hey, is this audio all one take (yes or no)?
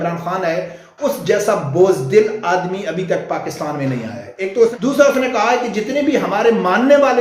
no